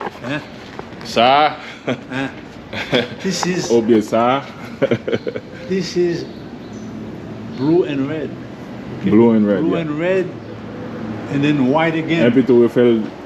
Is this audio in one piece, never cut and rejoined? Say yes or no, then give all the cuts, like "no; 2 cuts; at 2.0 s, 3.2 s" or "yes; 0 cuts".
yes; 0 cuts